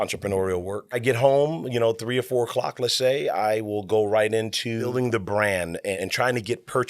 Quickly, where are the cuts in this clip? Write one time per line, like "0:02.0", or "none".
0:01.0
0:04.9
0:06.0